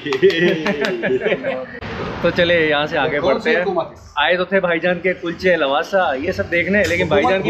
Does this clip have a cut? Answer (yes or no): no